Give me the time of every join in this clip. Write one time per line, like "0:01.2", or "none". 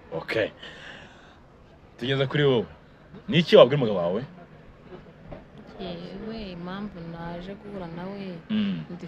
none

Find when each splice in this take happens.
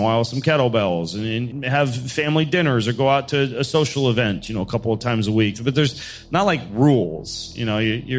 0:01.5

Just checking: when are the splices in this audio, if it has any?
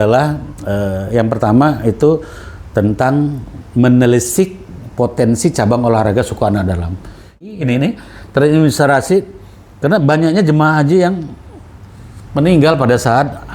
0:07.4

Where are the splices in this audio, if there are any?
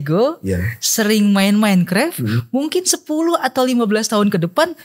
none

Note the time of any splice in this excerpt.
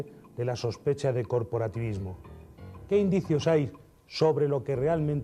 0:01.0

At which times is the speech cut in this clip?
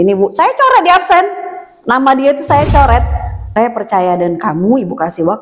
0:03.4

